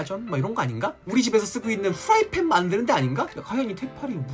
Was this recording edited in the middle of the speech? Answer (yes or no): yes